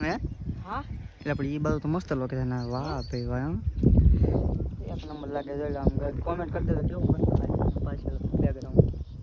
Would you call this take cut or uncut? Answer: uncut